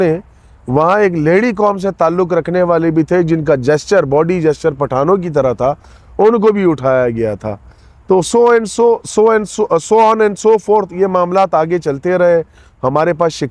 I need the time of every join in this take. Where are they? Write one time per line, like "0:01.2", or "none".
none

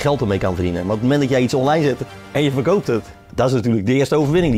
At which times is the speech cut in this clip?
0:03.2

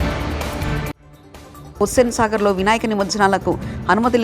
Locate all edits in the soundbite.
none

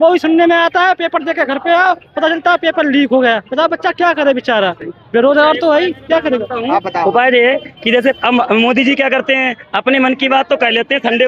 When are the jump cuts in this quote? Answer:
none

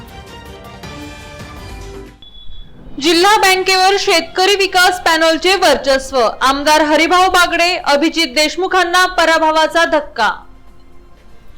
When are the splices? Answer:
0:01.8

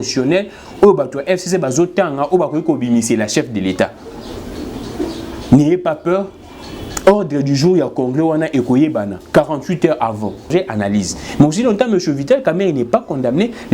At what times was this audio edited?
0:10.4

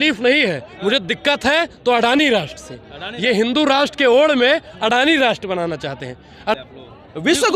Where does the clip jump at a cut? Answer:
0:06.5

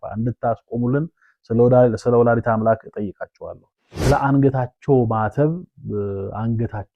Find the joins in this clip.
0:03.6

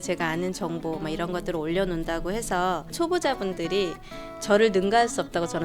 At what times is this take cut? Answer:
0:02.9

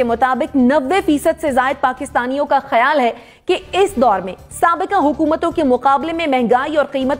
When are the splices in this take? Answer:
none

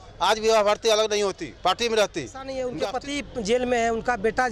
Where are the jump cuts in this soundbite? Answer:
0:02.6

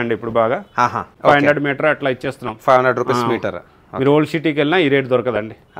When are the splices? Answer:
0:01.1

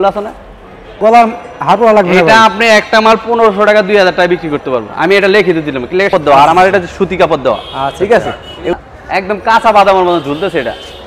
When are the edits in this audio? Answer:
0:00.9
0:06.1
0:08.7

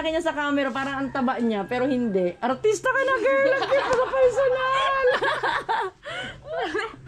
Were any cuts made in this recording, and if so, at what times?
none

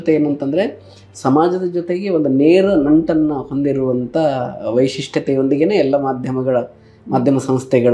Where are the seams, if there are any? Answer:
none

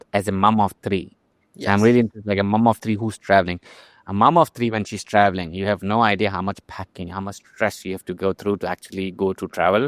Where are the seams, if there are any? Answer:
none

